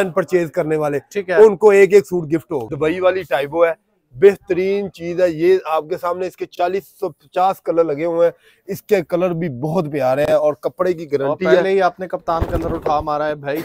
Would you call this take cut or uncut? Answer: uncut